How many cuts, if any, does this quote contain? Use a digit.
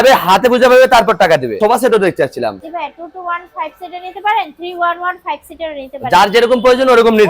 1